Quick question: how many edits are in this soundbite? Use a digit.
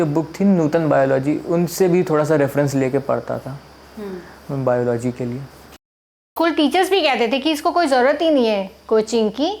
1